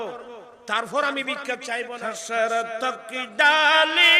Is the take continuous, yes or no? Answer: no